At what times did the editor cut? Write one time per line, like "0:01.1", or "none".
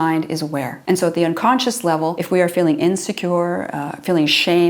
0:02.2